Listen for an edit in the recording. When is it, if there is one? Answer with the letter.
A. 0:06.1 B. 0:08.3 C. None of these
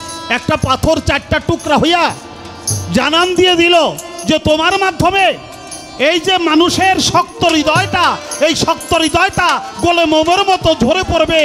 C